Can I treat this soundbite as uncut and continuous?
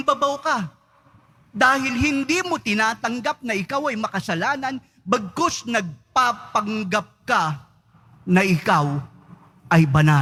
yes; 0 cuts

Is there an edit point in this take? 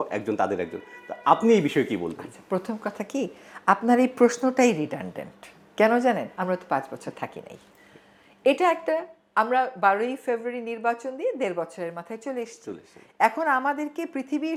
no; 0 cuts

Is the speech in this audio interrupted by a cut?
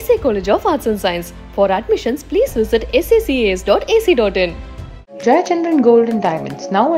no; 0 cuts

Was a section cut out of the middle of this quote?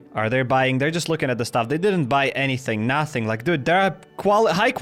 no; 0 cuts

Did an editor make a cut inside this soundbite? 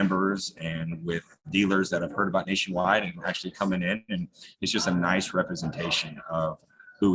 no; 0 cuts

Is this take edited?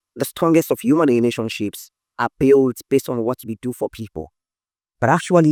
no; 0 cuts

